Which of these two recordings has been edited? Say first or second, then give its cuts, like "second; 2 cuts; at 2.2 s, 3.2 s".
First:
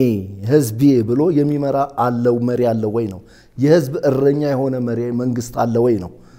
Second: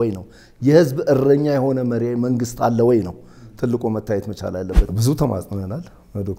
second; 1 cut; at 4.9 s